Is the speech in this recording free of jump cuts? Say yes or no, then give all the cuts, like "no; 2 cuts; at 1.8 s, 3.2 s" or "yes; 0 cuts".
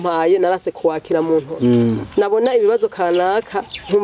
no; 1 cut; at 1.5 s